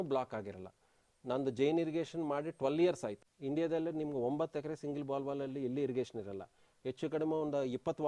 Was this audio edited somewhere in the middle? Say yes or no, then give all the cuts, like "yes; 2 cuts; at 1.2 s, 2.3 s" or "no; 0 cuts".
yes; 1 cut; at 3.3 s